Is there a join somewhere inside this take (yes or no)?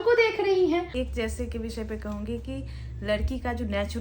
yes